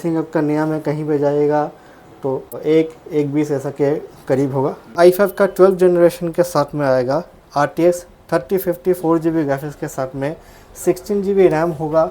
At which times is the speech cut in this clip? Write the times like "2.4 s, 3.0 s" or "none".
2.5 s, 4.9 s